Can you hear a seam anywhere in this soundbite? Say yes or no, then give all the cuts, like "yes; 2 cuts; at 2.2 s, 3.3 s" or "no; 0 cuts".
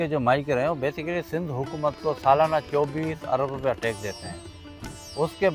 no; 0 cuts